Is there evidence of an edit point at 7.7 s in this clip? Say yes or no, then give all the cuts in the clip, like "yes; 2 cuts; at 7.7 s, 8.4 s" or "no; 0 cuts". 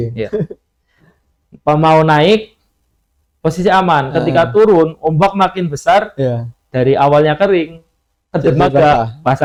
no; 0 cuts